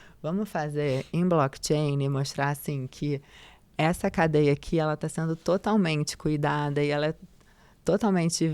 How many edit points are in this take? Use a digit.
0